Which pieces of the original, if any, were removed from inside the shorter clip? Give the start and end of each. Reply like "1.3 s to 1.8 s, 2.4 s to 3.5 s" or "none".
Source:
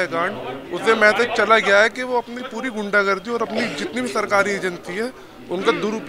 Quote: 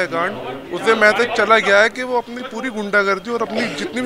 none